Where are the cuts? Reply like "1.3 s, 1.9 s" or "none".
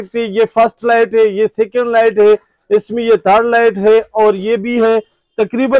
none